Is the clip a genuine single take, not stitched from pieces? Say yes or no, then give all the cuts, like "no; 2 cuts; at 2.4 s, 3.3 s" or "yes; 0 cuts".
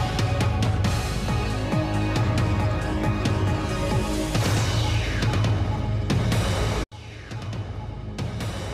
yes; 0 cuts